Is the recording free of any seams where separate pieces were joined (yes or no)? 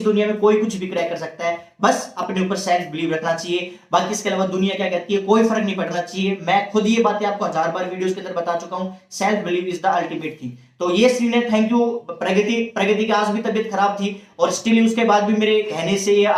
yes